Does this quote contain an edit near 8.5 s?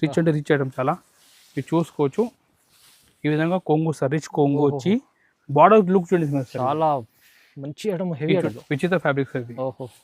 yes; 1 cut; at 8.5 s

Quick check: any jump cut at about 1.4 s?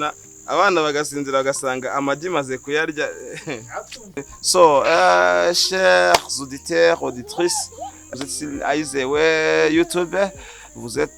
no; 2 cuts; at 4.2 s, 8.1 s

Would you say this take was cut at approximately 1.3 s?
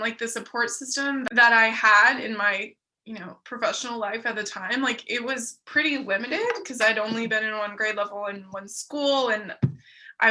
yes; 1 cut; at 1.3 s

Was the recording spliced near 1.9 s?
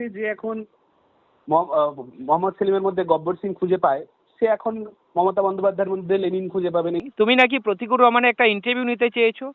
no; 1 cut; at 7.0 s

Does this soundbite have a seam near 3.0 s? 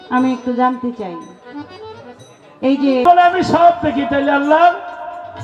yes; 1 cut; at 3.0 s

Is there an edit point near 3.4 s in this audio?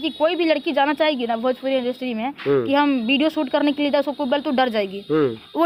no; 0 cuts

